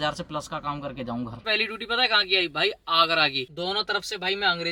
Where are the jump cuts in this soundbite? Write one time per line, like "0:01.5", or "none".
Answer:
0:01.4
0:03.4